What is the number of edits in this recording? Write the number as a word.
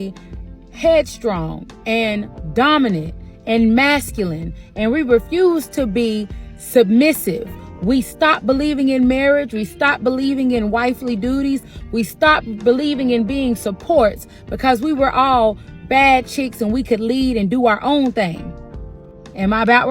one